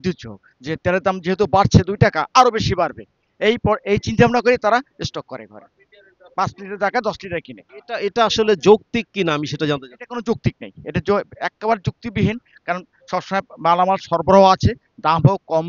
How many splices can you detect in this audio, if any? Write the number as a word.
zero